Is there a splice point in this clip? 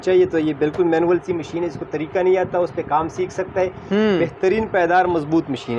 no; 0 cuts

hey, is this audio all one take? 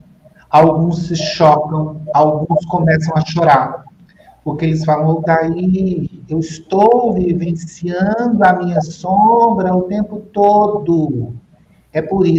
yes; 0 cuts

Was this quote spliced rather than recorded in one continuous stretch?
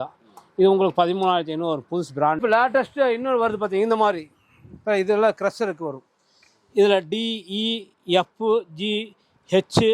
yes; 1 cut; at 2.4 s

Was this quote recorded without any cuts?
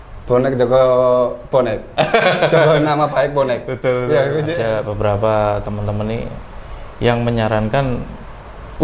no; 1 cut; at 4.5 s

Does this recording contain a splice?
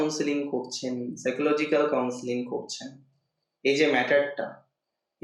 no; 0 cuts

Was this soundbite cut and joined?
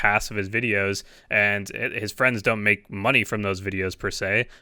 no; 0 cuts

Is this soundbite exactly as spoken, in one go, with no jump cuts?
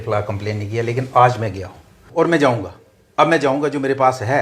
no; 1 cut; at 2.0 s

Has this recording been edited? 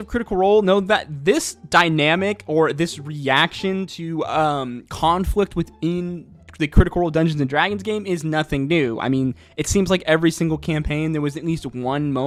no; 0 cuts

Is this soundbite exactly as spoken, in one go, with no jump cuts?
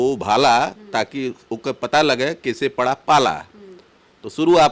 yes; 0 cuts

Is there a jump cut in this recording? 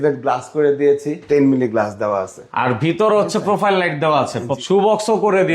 yes; 2 cuts; at 1.2 s, 4.5 s

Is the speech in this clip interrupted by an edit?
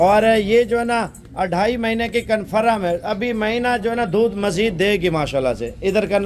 no; 0 cuts

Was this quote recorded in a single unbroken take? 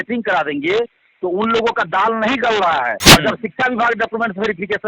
no; 1 cut; at 3.0 s

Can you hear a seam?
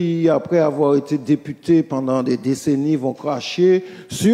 no; 0 cuts

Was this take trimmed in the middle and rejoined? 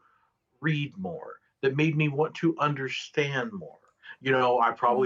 no; 0 cuts

